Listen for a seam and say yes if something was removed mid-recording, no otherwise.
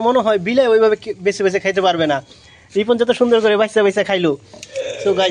yes